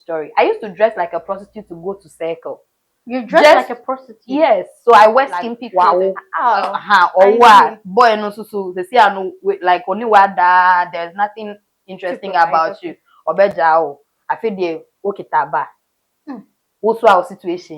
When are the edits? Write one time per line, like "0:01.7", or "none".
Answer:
0:05.6